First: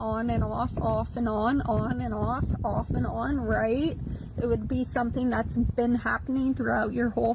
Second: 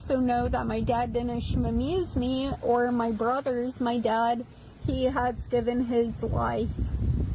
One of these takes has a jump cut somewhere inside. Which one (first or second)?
first